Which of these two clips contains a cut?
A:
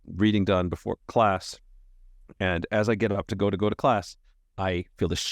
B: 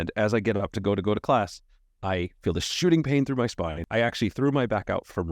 B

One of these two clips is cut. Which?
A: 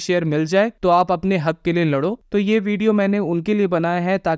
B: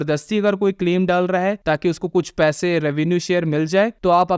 A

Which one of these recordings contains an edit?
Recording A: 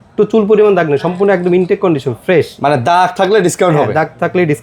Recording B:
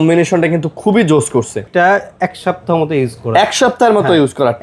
B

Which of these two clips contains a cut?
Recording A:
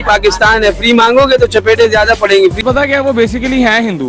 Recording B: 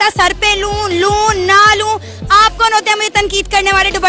A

